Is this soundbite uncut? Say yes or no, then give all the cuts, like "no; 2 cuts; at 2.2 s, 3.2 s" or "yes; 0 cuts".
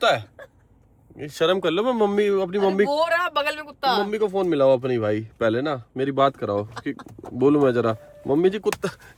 yes; 0 cuts